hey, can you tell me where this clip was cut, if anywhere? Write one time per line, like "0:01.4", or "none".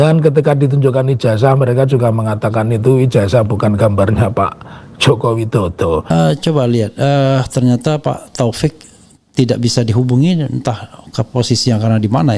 0:06.1